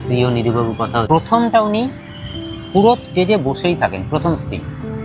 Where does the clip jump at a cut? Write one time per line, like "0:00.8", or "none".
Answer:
0:01.1